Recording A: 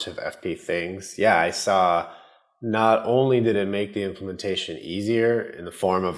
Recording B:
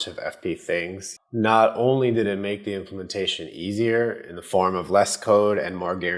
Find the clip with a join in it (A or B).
B